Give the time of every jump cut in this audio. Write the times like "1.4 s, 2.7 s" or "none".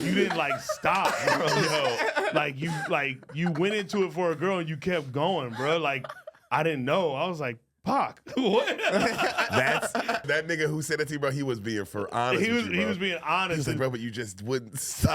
10.2 s